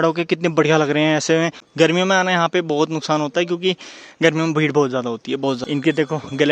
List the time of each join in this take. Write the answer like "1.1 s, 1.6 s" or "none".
1.7 s, 5.6 s